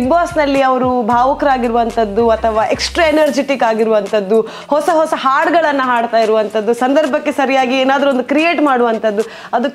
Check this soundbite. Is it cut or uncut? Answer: uncut